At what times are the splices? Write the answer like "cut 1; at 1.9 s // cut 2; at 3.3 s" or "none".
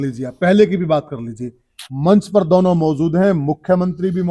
none